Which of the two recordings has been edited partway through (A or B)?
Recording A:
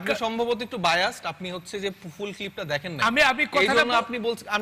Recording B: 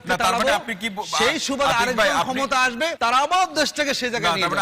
B